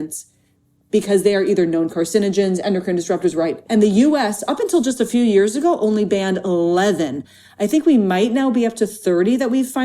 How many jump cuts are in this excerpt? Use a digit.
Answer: 1